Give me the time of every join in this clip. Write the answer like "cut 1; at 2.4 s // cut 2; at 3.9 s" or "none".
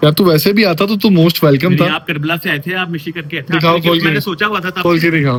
none